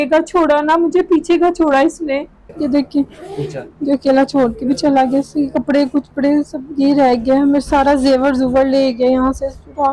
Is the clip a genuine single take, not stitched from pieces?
no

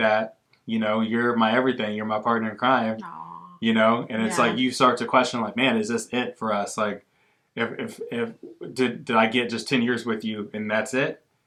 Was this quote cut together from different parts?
no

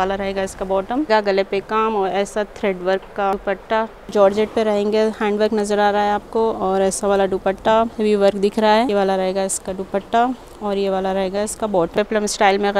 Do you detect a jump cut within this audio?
yes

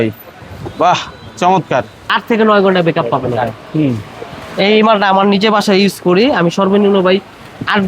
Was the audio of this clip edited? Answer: yes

